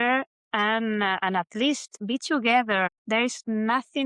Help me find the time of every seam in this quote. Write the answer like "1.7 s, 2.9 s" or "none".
1.9 s, 3.0 s